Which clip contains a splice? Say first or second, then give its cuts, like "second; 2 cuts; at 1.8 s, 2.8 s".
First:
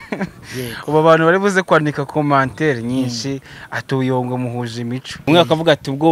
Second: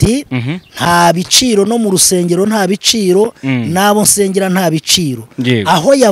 first; 1 cut; at 5.1 s